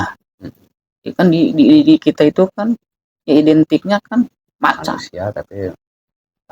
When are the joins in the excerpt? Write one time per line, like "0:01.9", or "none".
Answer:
0:05.1